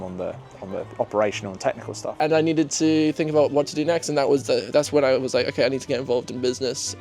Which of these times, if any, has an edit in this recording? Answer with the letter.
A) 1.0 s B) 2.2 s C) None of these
B